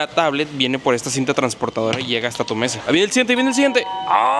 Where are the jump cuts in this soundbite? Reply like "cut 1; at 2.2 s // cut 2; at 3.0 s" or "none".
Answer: cut 1; at 2.8 s